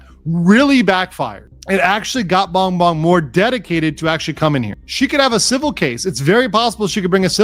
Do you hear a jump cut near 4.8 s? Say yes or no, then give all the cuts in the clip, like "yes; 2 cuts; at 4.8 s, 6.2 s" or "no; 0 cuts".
yes; 1 cut; at 4.8 s